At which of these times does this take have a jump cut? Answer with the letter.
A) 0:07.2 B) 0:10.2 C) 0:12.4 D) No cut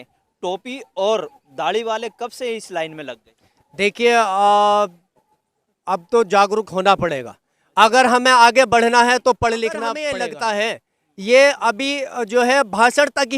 B